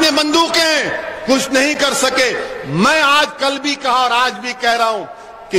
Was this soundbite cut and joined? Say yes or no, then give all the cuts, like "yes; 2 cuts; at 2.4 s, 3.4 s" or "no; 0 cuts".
no; 0 cuts